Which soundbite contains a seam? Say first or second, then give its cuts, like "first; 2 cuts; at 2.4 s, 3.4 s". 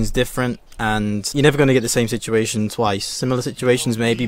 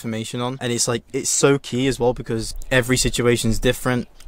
second; 1 cut; at 2.5 s